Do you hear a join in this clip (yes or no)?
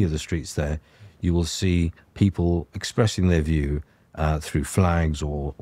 no